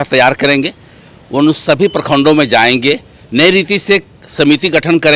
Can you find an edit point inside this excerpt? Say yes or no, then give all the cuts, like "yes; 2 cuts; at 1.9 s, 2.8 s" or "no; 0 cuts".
no; 0 cuts